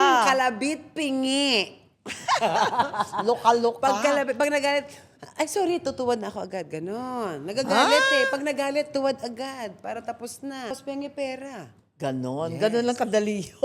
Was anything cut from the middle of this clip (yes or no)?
yes